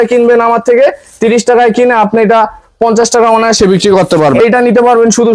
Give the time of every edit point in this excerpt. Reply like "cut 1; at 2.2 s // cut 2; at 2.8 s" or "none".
cut 1; at 4.4 s